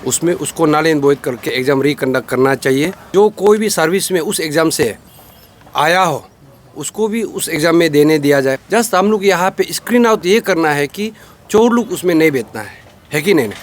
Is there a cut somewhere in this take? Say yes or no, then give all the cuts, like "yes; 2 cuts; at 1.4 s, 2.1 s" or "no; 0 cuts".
yes; 2 cuts; at 3.0 s, 8.6 s